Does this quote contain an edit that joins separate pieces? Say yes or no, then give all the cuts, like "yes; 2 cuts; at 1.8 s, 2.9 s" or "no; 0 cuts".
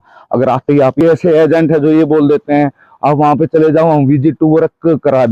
yes; 1 cut; at 1.0 s